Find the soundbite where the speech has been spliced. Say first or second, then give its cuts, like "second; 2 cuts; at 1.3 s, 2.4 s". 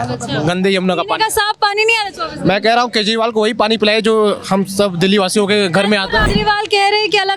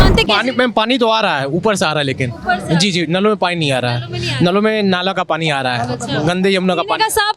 first; 1 cut; at 6.2 s